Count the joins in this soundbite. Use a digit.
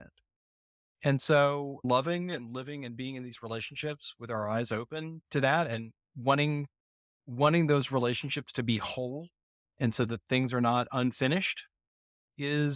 2